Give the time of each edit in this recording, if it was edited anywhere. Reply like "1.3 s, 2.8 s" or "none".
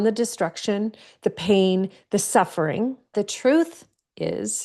3.1 s